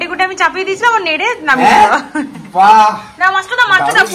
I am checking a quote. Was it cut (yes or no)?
no